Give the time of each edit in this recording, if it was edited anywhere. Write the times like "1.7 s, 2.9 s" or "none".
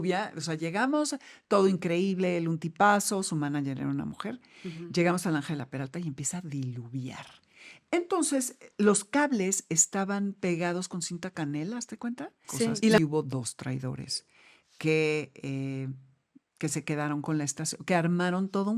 13.0 s